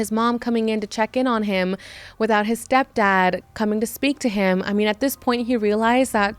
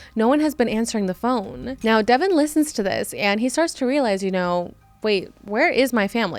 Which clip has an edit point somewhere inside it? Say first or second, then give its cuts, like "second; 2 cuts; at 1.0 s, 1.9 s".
second; 1 cut; at 1.7 s